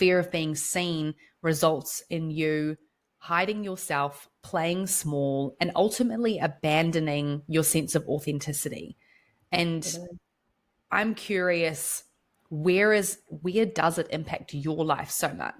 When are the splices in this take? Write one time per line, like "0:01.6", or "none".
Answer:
none